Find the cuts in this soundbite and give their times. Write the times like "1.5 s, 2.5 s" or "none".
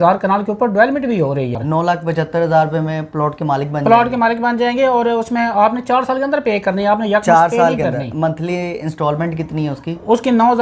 1.6 s